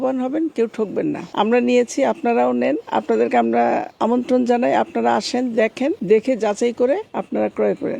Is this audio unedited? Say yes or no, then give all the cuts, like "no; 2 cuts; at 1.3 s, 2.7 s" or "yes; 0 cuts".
no; 5 cuts; at 1.2 s, 2.8 s, 3.9 s, 6.0 s, 7.1 s